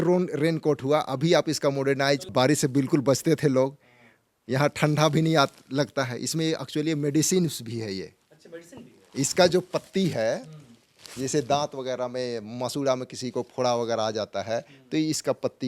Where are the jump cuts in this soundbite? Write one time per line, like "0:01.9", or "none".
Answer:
0:02.3